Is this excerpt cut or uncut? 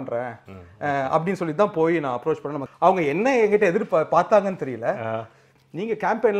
cut